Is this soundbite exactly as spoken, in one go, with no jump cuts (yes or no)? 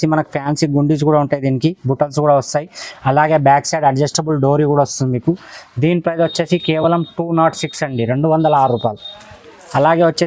yes